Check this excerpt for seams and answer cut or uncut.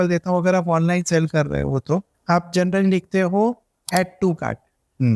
cut